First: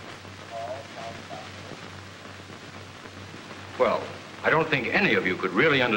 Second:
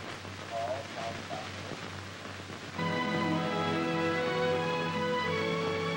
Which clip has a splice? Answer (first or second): first